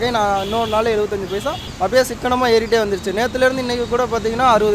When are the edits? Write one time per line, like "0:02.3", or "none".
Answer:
0:01.6